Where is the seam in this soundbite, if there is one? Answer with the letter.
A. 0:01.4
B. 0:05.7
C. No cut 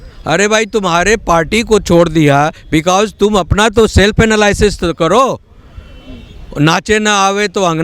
C